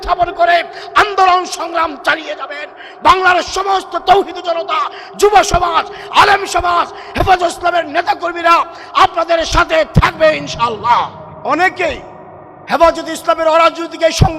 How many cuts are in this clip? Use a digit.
1